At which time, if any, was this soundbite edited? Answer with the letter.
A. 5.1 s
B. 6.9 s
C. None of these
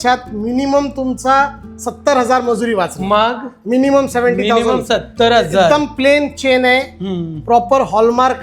C